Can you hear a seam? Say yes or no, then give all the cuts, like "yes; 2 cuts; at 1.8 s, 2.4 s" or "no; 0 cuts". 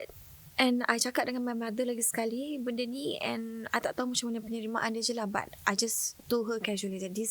no; 0 cuts